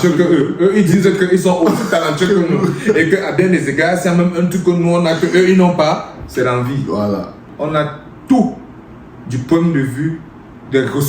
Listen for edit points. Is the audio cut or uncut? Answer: cut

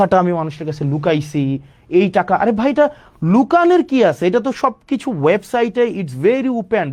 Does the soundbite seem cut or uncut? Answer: uncut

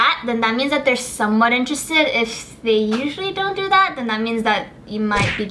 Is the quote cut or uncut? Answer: uncut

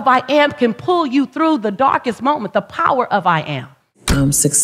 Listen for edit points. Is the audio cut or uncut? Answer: uncut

